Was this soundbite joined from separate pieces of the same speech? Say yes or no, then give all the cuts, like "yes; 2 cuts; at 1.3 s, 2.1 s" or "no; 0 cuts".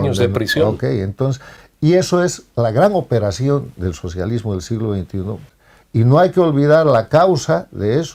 yes; 1 cut; at 5.5 s